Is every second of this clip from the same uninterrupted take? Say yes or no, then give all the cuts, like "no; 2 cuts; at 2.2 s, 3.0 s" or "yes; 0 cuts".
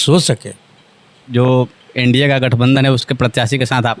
no; 1 cut; at 1.2 s